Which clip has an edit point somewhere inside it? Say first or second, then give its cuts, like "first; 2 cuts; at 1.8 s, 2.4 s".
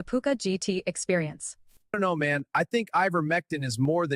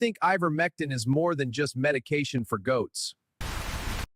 second; 1 cut; at 3.1 s